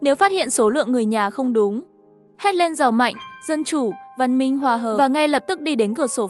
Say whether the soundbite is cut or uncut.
uncut